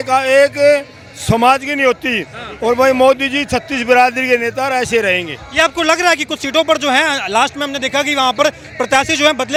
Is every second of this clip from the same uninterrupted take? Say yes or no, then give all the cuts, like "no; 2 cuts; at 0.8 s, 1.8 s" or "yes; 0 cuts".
yes; 0 cuts